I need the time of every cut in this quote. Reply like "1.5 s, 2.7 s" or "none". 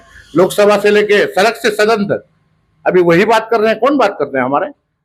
none